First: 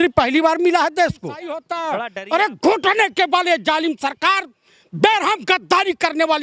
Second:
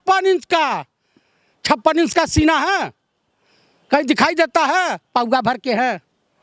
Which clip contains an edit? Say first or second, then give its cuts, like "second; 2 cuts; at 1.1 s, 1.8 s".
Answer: first; 1 cut; at 1.7 s